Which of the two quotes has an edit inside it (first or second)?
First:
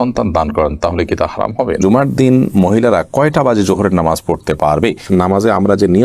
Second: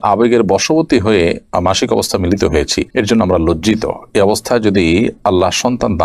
first